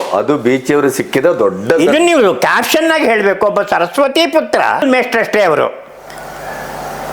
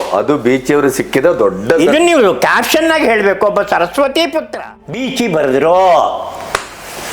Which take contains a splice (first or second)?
second